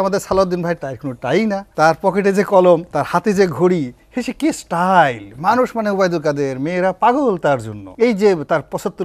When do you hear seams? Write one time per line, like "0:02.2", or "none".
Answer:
0:01.7
0:02.9
0:07.8

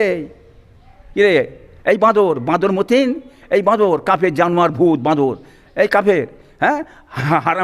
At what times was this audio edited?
0:01.6

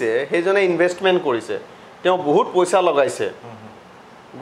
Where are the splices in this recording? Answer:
none

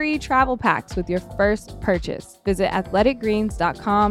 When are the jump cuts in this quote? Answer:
0:02.4

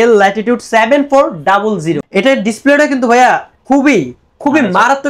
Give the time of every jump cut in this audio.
0:02.0

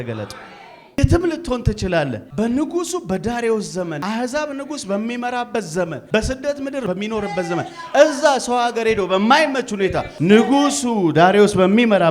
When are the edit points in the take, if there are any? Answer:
0:01.0
0:02.2
0:04.0
0:06.0
0:06.9
0:10.1

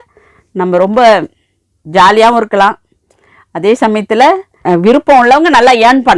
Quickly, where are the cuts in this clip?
none

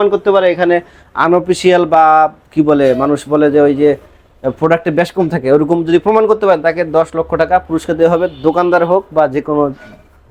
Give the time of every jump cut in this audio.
none

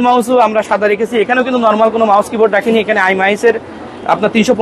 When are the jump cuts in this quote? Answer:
none

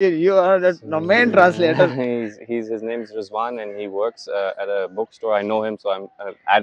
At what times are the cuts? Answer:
none

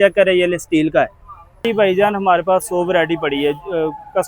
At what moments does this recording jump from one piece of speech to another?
0:01.6

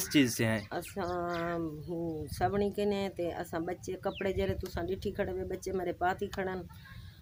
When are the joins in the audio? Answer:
none

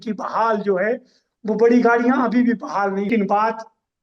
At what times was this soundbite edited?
0:03.1

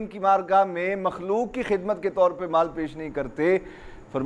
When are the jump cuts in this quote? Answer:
none

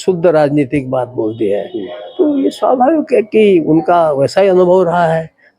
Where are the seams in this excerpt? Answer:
none

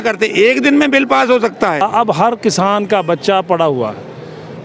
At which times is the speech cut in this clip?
0:01.8

